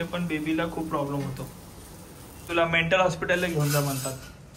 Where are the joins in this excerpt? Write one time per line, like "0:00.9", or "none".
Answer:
0:02.5